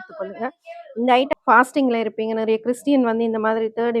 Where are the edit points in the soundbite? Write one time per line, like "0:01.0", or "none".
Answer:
0:01.3